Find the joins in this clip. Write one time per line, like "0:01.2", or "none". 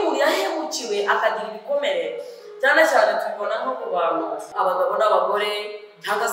0:04.5